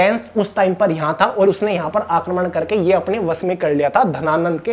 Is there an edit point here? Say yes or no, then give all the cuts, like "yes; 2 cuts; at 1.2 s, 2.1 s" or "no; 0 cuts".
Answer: no; 0 cuts